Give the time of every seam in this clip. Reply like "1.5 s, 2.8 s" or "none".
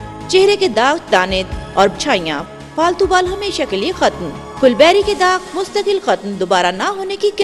none